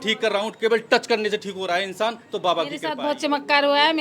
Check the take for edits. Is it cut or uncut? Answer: cut